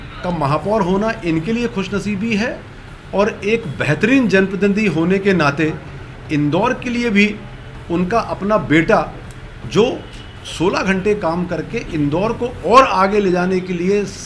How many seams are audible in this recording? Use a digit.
0